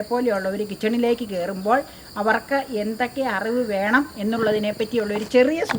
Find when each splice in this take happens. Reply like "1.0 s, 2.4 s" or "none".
none

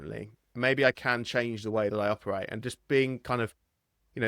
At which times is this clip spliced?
none

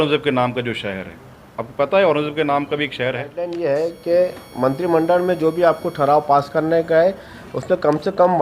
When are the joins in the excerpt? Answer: 3.5 s

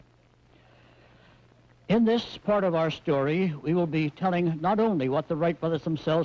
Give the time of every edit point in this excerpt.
4.3 s

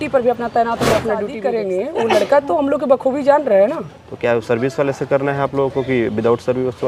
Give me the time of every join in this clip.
1.4 s

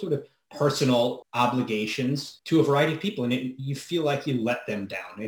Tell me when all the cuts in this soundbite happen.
1.2 s, 2.3 s

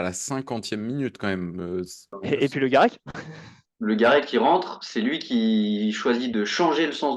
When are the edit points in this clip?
2.2 s

